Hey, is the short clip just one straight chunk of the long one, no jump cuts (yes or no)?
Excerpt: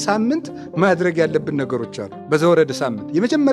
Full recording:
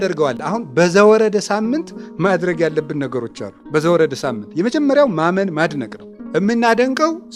yes